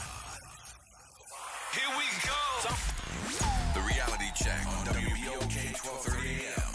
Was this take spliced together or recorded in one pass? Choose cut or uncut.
uncut